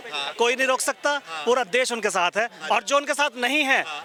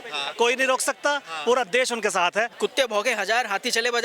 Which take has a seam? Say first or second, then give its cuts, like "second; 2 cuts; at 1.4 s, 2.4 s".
second; 1 cut; at 2.5 s